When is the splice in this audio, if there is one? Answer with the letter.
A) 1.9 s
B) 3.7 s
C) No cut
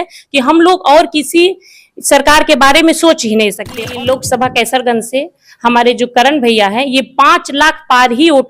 B